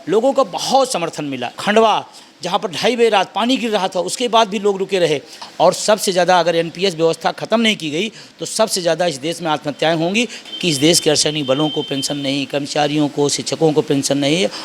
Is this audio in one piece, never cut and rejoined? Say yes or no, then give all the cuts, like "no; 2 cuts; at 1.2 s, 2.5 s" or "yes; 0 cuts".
no; 3 cuts; at 1.5 s, 5.4 s, 10.4 s